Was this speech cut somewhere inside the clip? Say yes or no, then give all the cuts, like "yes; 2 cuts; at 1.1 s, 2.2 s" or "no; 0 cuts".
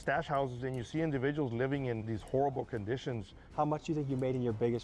yes; 2 cuts; at 2.2 s, 3.4 s